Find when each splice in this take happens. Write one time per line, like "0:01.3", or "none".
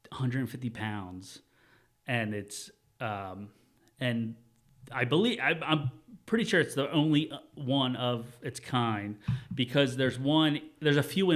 none